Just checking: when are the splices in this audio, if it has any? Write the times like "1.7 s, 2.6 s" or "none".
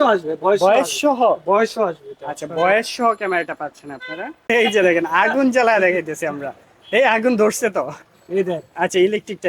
4.5 s

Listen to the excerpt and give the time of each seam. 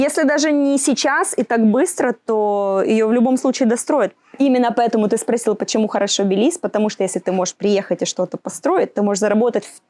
4.2 s

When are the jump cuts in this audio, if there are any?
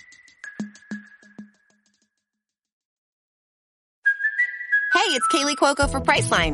none

